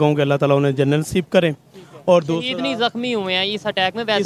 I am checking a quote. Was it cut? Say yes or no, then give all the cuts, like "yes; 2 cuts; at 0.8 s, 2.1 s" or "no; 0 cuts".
no; 0 cuts